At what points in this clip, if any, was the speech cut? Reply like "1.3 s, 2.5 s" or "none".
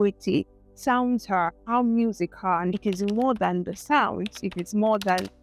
2.8 s